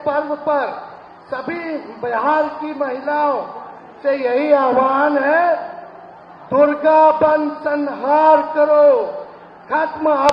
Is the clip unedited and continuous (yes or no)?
yes